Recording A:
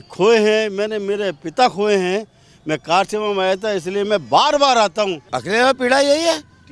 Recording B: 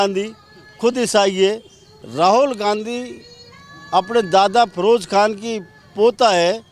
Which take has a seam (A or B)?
A